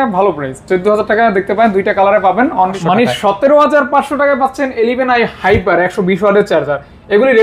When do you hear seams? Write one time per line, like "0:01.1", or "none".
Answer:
0:02.8